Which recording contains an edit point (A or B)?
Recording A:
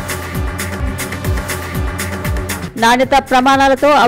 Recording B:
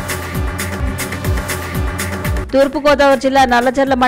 B